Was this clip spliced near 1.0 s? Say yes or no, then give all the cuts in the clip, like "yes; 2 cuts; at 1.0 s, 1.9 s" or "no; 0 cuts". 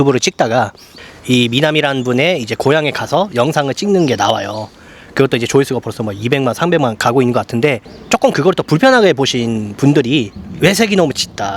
yes; 3 cuts; at 1.0 s, 7.9 s, 10.4 s